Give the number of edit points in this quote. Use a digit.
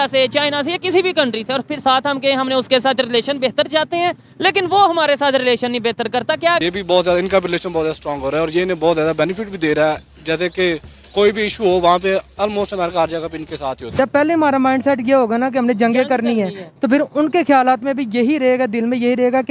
2